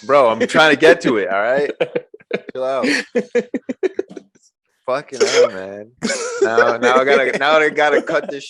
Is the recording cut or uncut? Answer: uncut